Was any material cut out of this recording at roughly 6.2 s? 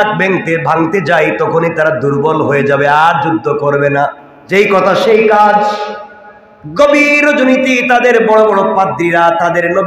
no; 1 cut; at 4.3 s

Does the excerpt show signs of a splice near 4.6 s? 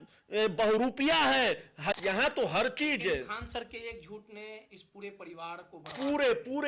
no; 1 cut; at 2.0 s

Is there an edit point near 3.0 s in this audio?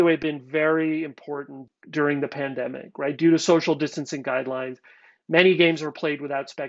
no; 1 cut; at 1.6 s

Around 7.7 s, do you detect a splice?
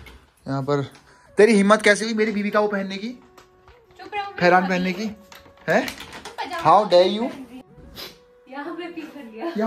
yes; 1 cut; at 7.7 s

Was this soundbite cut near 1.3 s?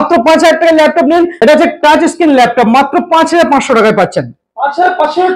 yes; 1 cut; at 1.3 s

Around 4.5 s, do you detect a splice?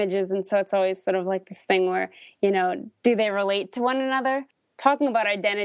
yes; 1 cut; at 4.5 s

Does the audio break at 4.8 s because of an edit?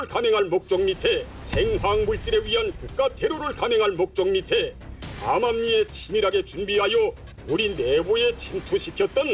yes; 2 cuts; at 1.4 s, 4.8 s

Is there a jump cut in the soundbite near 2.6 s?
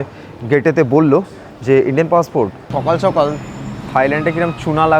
yes; 1 cut; at 2.6 s

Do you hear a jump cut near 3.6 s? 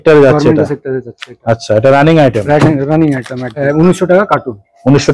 yes; 1 cut; at 3.6 s

